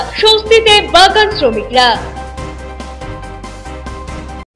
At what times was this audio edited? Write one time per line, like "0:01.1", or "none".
none